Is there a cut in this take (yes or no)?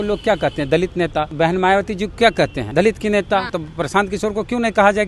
yes